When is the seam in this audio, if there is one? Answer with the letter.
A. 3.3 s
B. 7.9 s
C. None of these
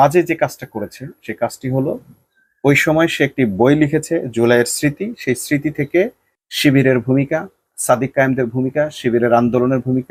C